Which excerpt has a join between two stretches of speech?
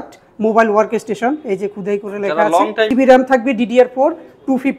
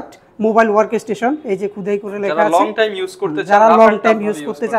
first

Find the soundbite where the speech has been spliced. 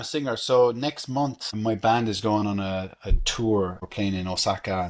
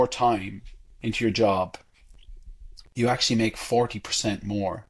first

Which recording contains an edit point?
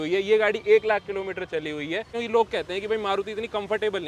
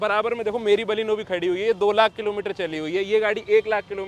first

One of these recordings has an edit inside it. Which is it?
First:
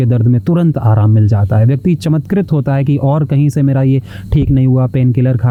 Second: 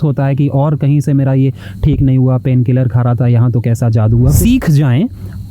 second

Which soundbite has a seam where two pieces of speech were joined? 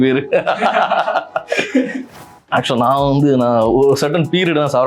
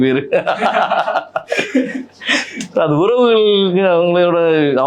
first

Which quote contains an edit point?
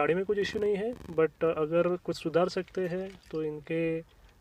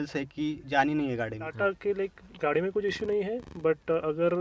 second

